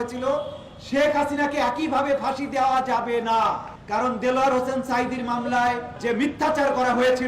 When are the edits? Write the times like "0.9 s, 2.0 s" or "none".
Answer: 3.7 s, 5.9 s